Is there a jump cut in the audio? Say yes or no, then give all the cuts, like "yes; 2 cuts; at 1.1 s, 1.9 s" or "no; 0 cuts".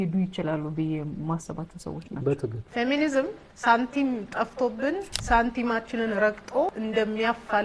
yes; 3 cuts; at 2.6 s, 3.5 s, 5.1 s